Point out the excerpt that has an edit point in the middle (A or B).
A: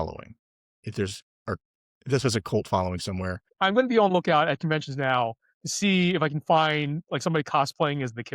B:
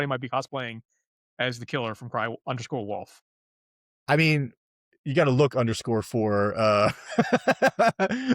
A